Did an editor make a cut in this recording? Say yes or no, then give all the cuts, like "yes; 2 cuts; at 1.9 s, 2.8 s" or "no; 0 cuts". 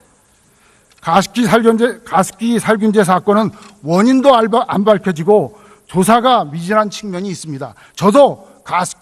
yes; 1 cut; at 4.5 s